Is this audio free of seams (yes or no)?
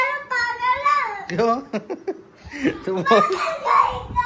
yes